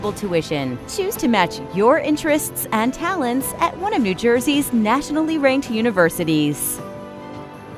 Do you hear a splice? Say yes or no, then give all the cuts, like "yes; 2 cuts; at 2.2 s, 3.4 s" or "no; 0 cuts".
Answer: yes; 1 cut; at 6.6 s